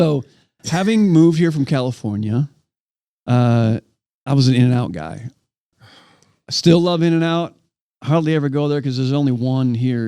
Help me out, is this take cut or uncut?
uncut